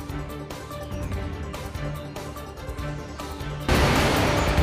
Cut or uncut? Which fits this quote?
cut